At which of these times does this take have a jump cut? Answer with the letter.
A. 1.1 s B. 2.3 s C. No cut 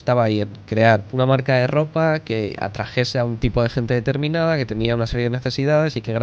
A